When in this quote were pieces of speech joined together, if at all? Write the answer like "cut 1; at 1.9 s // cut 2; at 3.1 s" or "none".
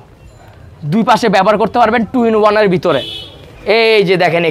cut 1; at 3.5 s

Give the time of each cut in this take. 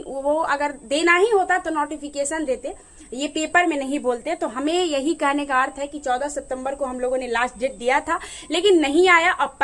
none

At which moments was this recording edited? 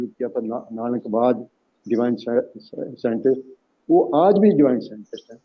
none

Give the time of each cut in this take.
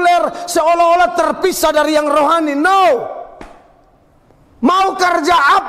none

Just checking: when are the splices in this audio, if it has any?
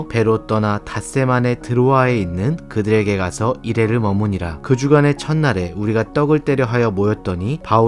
cut 1; at 4.6 s

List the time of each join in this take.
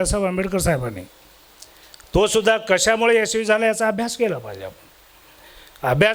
none

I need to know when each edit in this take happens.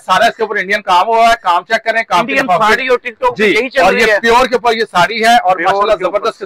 none

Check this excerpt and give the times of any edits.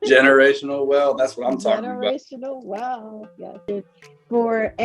cut 1; at 3.6 s

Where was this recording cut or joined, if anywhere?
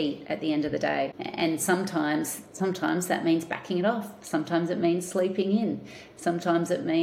cut 1; at 1.2 s

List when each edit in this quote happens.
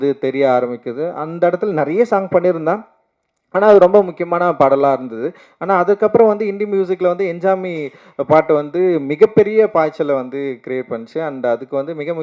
none

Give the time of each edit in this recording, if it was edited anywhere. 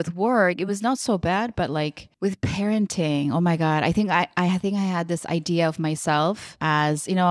none

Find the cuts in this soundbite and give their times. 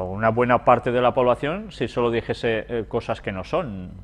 cut 1; at 1.1 s

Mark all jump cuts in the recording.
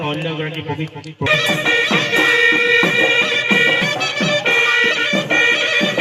cut 1; at 1.2 s

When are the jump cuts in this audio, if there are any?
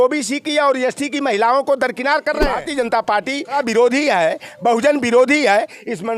cut 1; at 2.6 s // cut 2; at 3.5 s

